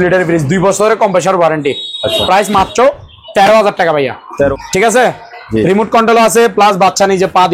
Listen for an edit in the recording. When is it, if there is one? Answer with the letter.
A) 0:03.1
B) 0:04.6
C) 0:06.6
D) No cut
B